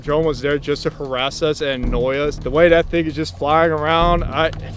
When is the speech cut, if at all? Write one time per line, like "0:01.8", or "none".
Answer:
0:02.4